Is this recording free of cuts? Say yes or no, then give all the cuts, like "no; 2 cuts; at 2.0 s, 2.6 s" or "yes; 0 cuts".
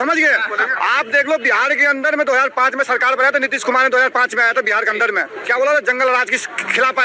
yes; 0 cuts